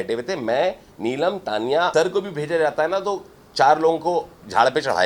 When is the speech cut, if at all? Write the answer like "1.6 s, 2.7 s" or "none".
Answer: 1.9 s